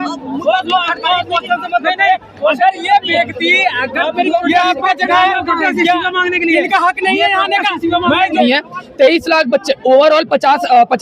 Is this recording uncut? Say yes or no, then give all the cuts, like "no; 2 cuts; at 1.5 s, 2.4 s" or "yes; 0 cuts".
no; 2 cuts; at 4.4 s, 8.4 s